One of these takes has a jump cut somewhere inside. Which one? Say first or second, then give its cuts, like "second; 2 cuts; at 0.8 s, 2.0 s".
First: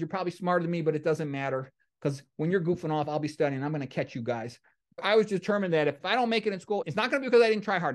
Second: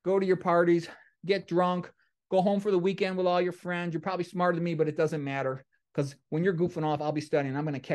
first; 3 cuts; at 5.0 s, 6.0 s, 6.8 s